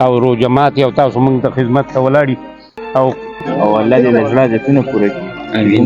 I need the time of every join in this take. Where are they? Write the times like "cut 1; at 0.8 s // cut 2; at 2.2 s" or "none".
cut 1; at 3.3 s